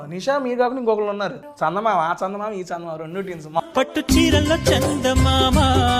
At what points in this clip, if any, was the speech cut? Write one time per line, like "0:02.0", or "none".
0:01.4
0:03.6